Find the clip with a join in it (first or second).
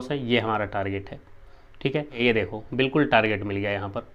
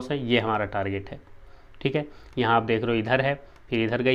first